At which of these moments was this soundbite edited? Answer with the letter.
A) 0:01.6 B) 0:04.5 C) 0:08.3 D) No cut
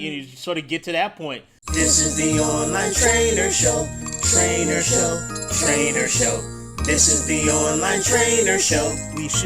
A